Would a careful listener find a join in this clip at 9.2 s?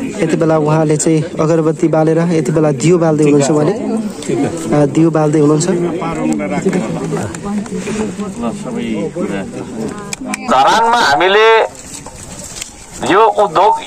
no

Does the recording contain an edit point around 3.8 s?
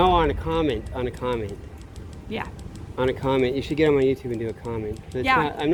no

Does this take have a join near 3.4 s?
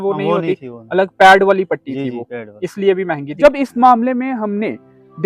yes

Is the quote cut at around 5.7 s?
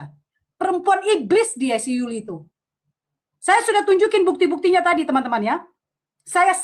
no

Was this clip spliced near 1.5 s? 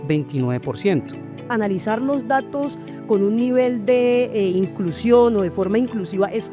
yes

